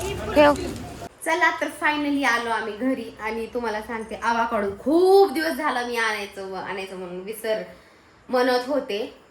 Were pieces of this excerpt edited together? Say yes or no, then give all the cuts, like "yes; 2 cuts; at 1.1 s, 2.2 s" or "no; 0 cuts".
yes; 1 cut; at 1.1 s